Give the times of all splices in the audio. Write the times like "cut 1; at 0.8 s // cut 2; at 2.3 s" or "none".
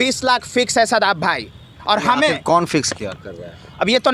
none